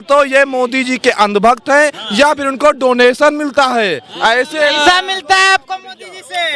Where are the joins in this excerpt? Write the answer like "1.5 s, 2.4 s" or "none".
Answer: none